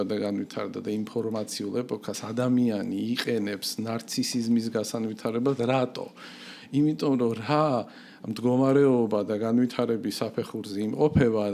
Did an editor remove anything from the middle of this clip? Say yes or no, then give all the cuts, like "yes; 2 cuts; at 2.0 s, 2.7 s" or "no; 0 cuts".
no; 0 cuts